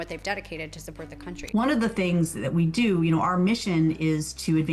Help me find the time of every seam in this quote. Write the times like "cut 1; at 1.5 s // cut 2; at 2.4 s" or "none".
cut 1; at 1.4 s